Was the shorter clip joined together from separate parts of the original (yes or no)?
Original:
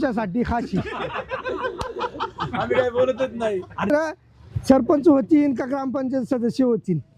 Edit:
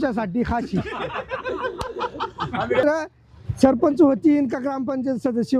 yes